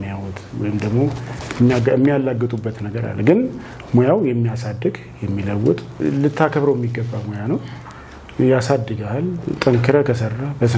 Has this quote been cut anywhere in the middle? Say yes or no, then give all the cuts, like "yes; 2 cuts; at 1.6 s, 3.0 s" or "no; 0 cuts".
no; 0 cuts